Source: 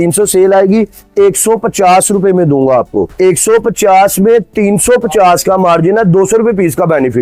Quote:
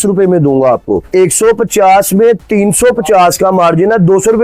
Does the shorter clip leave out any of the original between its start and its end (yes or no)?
no